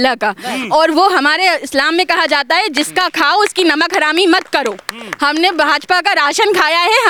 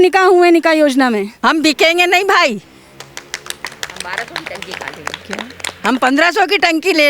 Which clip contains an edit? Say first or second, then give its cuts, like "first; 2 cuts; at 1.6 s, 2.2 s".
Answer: second; 1 cut; at 1.3 s